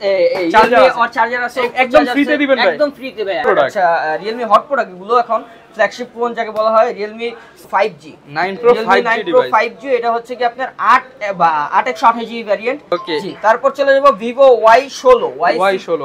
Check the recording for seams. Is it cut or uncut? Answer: cut